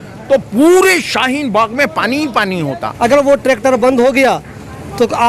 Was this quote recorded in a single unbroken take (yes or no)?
no